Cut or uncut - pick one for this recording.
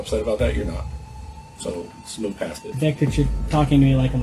cut